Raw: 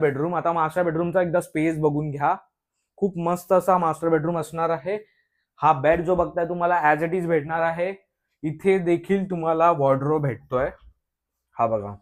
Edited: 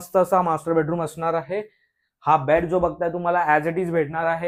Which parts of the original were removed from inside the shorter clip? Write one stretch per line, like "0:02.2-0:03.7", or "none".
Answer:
none